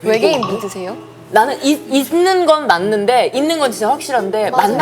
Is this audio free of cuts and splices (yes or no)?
no